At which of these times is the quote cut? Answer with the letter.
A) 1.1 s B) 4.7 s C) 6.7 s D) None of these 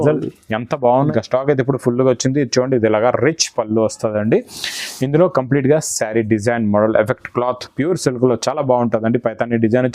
A